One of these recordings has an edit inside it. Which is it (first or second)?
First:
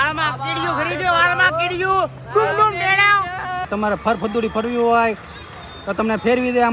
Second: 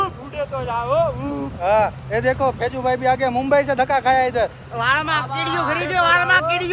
first